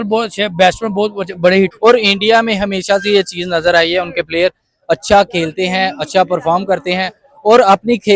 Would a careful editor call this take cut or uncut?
cut